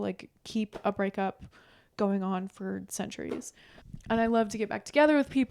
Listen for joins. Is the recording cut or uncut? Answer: uncut